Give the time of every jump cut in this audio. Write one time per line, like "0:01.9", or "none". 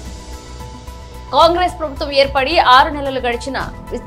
0:01.1